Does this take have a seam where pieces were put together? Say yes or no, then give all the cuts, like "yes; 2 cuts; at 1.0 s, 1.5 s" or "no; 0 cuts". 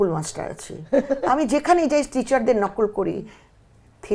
no; 0 cuts